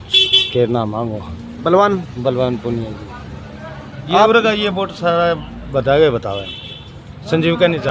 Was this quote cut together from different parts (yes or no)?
no